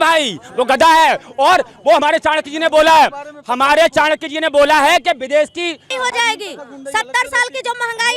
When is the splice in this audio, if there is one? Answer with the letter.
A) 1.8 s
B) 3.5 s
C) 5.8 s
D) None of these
C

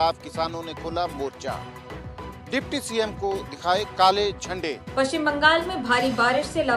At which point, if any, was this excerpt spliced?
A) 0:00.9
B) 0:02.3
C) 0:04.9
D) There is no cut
C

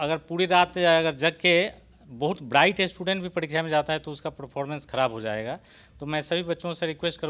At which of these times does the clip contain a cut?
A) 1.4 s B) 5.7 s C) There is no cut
C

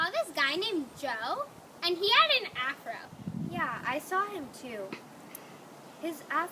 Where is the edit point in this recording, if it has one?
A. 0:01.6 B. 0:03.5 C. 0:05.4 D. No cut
B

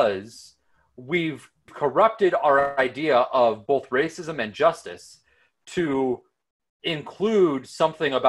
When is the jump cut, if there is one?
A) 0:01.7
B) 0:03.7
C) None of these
A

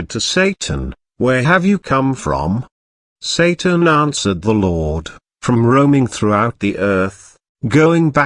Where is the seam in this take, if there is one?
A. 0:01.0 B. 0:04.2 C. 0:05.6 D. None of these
A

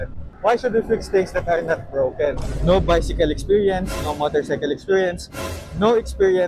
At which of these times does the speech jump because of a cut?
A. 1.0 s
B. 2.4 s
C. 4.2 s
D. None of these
B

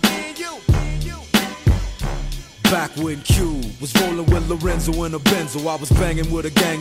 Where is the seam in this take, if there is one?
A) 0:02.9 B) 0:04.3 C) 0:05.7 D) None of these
D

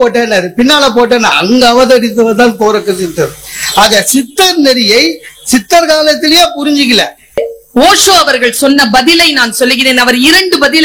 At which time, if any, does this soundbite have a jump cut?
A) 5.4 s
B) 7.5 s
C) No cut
B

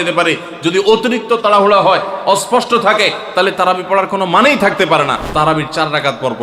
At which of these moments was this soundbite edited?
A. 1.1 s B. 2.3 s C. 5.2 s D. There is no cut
C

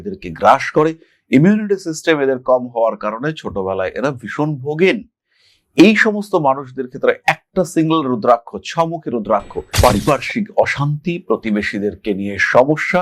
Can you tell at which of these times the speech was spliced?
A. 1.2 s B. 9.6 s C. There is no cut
B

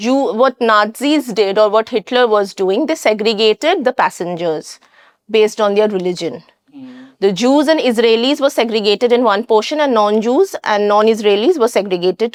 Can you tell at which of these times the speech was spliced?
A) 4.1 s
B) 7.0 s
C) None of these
C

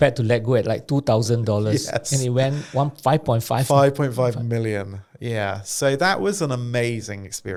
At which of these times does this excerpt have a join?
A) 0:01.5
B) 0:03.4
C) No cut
C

